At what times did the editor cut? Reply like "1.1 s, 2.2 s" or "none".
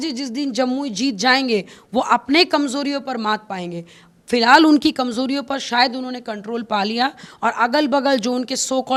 none